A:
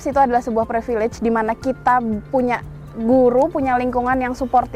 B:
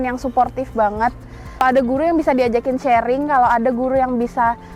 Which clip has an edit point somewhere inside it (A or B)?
B